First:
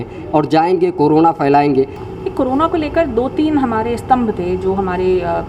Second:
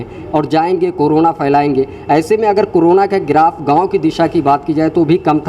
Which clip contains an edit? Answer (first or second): first